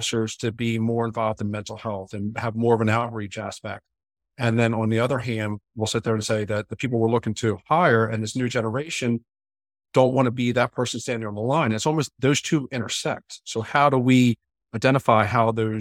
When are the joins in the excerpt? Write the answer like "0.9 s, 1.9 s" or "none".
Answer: none